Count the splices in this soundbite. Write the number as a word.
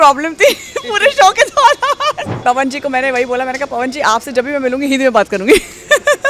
one